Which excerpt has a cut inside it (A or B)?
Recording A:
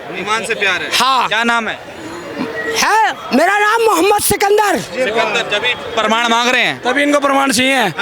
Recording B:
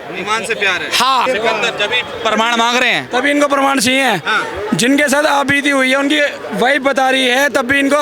B